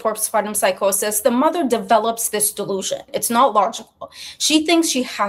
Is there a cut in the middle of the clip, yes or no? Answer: no